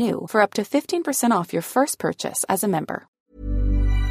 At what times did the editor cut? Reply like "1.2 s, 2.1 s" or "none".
3.1 s